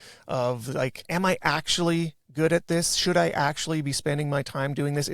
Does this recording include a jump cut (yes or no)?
yes